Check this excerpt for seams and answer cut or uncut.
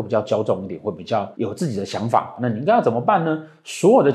uncut